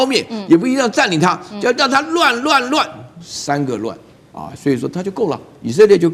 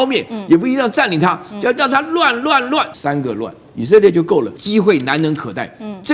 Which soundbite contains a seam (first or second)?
second